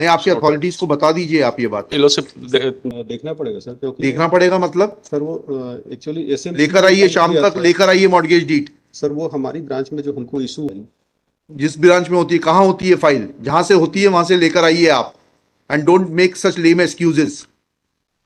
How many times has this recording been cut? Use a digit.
2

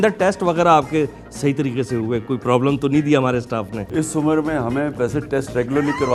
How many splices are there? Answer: 0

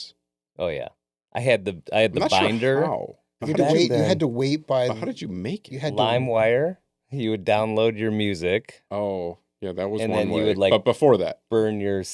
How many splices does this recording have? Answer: 1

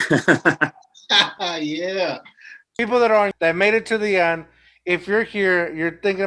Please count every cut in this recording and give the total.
2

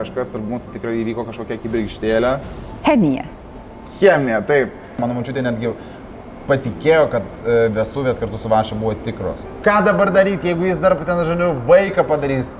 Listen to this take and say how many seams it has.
2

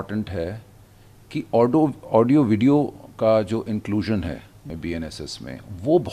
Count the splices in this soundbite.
1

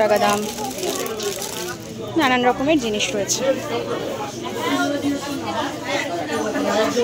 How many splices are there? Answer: 0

